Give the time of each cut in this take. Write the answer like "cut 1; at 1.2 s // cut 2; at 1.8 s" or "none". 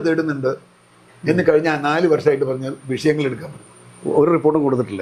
none